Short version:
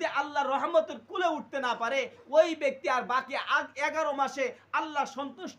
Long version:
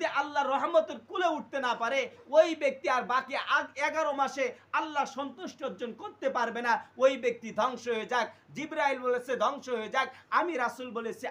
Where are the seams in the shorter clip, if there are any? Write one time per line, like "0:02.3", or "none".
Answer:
none